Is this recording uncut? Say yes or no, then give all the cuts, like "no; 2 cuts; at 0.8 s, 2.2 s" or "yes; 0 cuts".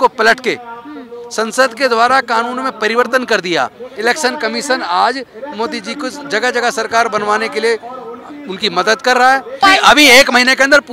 no; 2 cuts; at 3.8 s, 9.6 s